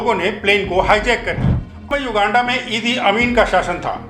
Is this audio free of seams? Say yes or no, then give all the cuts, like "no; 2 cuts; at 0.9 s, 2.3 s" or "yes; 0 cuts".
no; 1 cut; at 1.9 s